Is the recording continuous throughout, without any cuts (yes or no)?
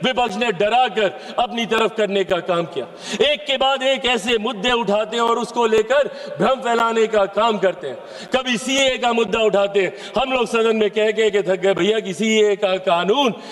yes